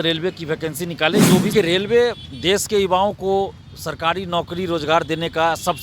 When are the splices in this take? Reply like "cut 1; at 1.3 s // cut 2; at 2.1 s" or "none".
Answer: cut 1; at 1.5 s